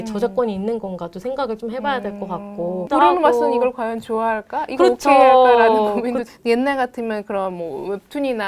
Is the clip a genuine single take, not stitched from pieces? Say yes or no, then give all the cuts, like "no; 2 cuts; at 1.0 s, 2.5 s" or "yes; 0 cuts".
no; 2 cuts; at 2.9 s, 6.3 s